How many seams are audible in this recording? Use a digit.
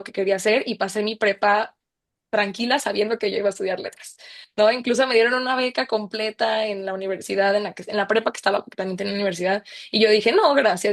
0